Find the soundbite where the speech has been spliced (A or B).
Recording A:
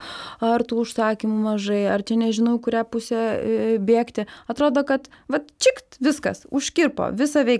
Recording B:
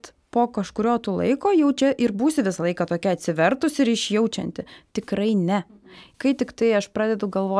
B